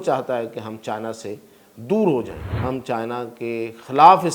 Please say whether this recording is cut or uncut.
cut